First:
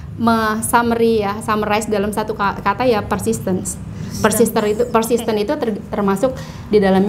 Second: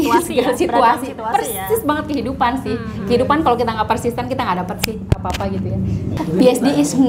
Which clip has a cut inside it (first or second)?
second